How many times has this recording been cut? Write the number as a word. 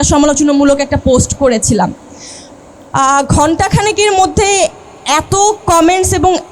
zero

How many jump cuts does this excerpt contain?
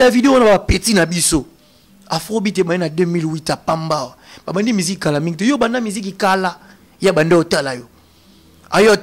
zero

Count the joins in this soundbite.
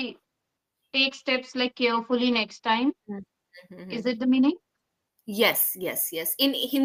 zero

